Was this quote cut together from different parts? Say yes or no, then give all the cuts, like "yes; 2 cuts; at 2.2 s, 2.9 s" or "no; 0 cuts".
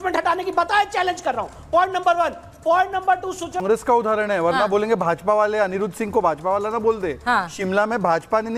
yes; 1 cut; at 3.6 s